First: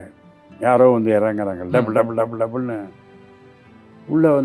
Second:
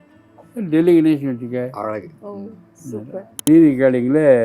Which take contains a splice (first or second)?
second